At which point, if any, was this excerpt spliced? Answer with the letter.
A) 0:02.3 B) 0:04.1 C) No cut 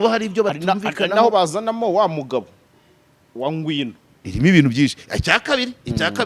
B